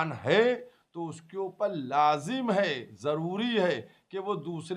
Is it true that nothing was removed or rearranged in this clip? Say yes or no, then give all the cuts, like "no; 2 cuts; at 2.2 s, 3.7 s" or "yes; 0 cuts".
yes; 0 cuts